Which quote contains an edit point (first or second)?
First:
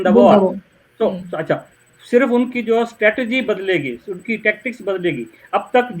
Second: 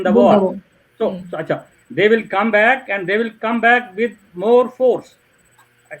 first